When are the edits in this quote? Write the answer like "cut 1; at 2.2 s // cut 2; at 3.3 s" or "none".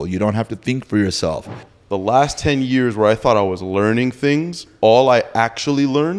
cut 1; at 1.6 s // cut 2; at 4.6 s

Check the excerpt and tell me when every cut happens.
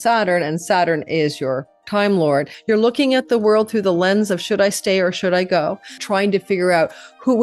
cut 1; at 2.5 s // cut 2; at 6.0 s

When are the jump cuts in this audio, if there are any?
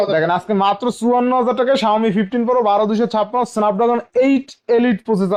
none

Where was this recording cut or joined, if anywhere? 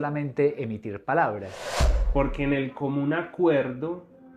cut 1; at 1.9 s

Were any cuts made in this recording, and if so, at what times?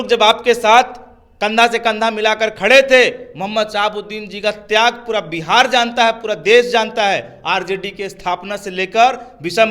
none

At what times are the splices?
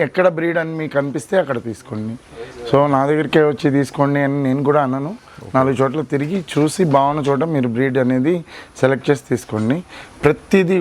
none

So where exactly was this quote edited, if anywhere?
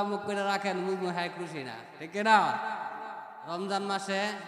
cut 1; at 3.3 s

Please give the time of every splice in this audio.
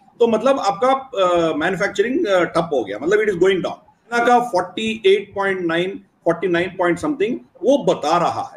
cut 1; at 4.1 s

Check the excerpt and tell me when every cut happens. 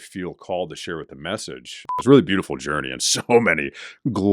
cut 1; at 1.9 s

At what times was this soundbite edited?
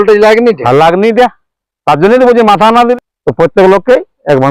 cut 1; at 2.9 s

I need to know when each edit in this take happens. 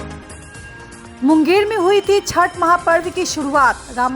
none

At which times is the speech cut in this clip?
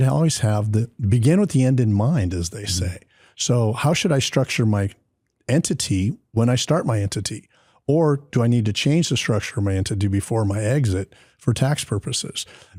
none

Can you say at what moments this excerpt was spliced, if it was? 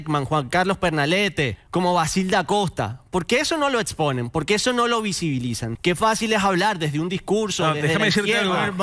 cut 1; at 1.6 s // cut 2; at 5.7 s

